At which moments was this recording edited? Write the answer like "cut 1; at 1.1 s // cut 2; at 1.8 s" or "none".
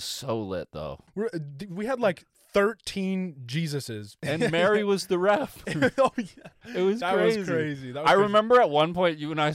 cut 1; at 1.0 s // cut 2; at 4.2 s